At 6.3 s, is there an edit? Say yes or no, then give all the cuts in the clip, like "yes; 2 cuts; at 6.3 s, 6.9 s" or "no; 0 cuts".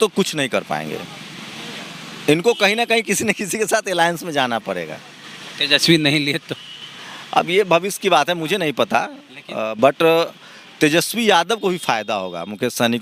no; 0 cuts